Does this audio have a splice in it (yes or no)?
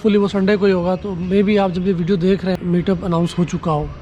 yes